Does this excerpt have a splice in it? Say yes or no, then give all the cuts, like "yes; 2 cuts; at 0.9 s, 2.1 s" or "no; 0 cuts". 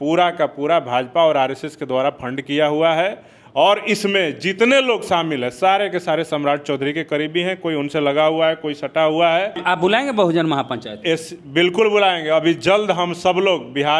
yes; 1 cut; at 9.6 s